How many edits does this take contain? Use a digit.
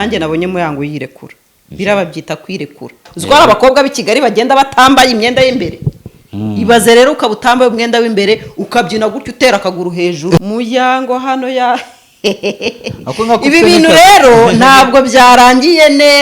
2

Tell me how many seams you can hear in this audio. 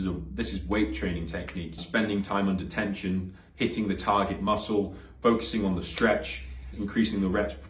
2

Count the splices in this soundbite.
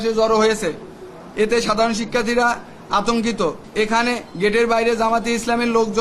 1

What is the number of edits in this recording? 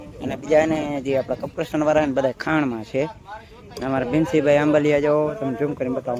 0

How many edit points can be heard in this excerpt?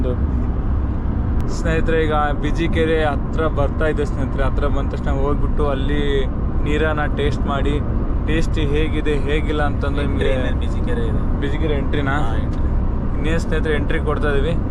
0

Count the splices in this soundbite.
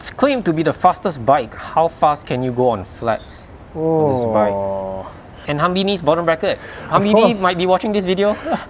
1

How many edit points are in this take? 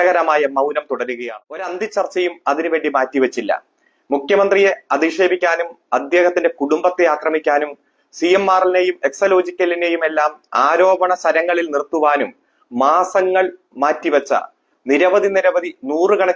1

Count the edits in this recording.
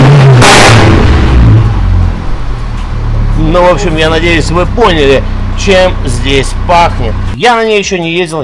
1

